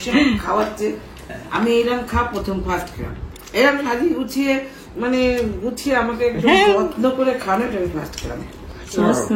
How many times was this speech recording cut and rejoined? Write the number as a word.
zero